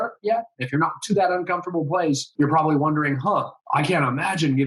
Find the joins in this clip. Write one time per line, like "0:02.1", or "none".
0:02.3